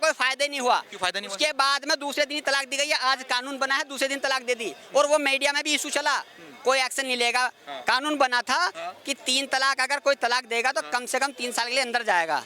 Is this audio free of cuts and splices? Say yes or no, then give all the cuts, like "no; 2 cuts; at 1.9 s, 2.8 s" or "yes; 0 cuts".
yes; 0 cuts